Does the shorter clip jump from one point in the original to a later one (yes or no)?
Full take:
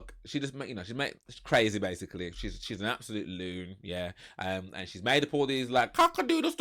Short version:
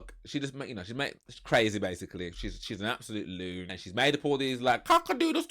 yes